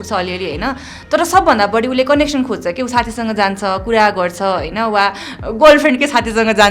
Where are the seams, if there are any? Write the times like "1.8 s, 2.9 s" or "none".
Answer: none